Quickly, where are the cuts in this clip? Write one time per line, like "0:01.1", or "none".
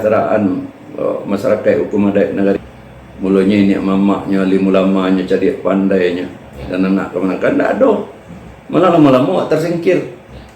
0:02.6